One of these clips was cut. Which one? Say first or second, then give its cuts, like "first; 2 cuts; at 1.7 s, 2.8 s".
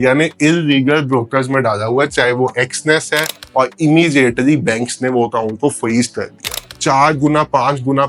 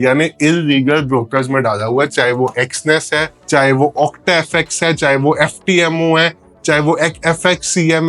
first; 2 cuts; at 3.3 s, 6.6 s